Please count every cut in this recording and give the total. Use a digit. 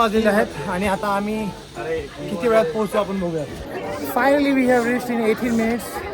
1